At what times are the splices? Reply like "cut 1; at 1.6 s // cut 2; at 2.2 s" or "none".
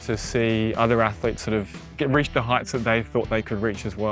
none